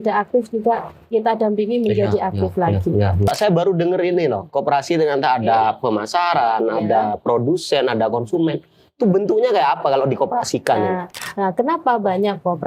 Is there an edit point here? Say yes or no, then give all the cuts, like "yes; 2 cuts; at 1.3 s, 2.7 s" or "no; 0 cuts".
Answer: yes; 2 cuts; at 3.3 s, 11.2 s